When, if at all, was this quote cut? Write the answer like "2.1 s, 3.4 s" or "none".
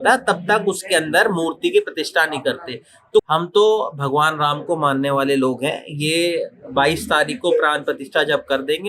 3.3 s